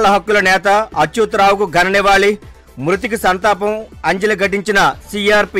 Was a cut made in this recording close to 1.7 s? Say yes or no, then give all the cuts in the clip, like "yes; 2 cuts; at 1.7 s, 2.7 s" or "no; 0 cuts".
no; 0 cuts